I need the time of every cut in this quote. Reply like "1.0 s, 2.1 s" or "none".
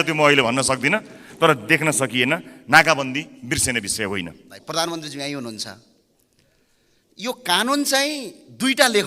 4.6 s